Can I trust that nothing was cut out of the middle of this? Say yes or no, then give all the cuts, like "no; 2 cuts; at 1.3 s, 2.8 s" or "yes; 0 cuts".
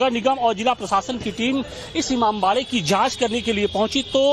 yes; 0 cuts